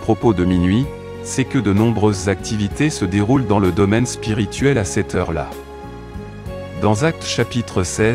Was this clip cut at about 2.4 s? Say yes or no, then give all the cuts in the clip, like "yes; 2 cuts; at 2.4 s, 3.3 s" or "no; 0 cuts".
no; 2 cuts; at 5.5 s, 6.8 s